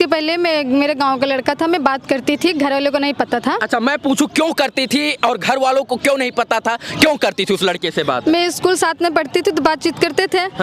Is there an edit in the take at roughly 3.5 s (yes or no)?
no